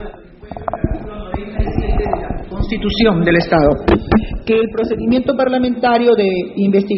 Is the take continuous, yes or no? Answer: no